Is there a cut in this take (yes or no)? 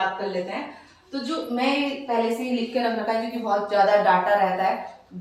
no